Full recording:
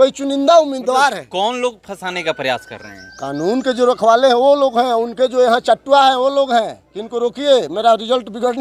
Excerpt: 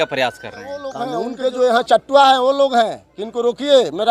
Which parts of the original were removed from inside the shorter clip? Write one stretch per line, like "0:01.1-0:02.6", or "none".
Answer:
0:03.3-0:04.8